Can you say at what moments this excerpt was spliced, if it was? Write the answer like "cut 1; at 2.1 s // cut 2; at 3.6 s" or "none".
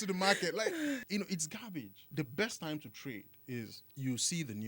cut 1; at 1.0 s // cut 2; at 2.1 s // cut 3; at 3.8 s